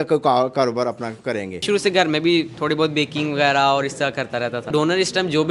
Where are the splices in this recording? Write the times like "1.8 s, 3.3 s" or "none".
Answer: 1.6 s, 4.7 s